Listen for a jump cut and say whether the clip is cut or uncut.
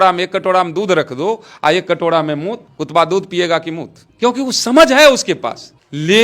uncut